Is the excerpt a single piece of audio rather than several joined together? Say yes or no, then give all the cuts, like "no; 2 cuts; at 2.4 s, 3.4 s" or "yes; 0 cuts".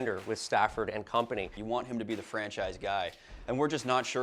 no; 1 cut; at 1.6 s